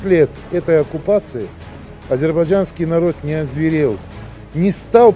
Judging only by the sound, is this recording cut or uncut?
uncut